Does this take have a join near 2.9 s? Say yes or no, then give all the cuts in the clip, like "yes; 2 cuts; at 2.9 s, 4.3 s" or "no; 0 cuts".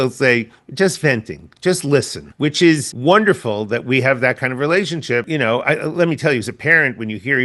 yes; 3 cuts; at 2.2 s, 2.9 s, 5.3 s